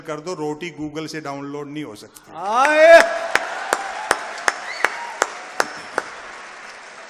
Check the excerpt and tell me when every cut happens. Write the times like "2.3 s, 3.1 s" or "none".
none

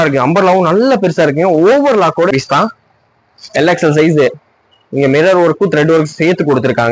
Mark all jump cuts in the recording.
2.3 s

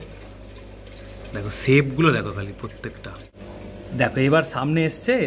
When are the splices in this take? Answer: 3.6 s

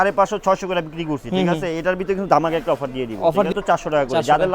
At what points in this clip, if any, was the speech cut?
3.5 s

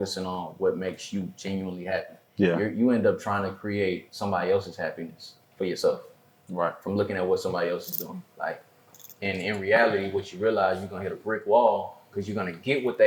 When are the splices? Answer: none

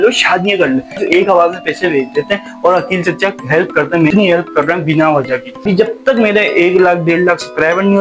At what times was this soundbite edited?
1.0 s, 4.1 s, 5.6 s

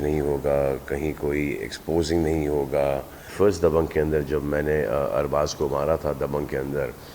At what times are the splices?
3.2 s

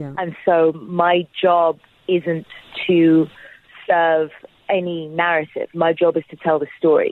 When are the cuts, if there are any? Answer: none

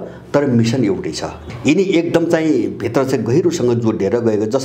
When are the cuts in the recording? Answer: 1.4 s

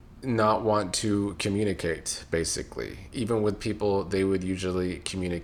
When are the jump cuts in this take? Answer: none

